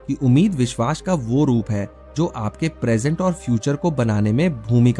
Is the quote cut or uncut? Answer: uncut